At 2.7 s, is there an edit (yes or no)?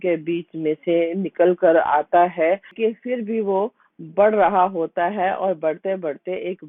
yes